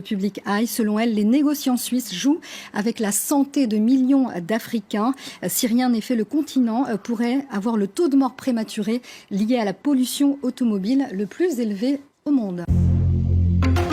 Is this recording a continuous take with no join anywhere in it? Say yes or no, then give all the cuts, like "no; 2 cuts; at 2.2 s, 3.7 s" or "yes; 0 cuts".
no; 1 cut; at 12.7 s